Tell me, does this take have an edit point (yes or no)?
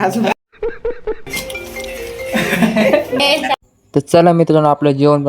yes